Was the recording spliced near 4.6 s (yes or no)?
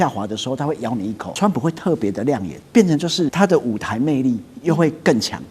no